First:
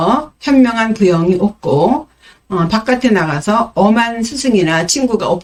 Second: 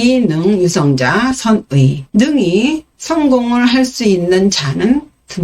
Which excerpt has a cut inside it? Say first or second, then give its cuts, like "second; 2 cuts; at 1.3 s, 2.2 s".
second; 1 cut; at 2.0 s